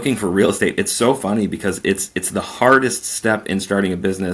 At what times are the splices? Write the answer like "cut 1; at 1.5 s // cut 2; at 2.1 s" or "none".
none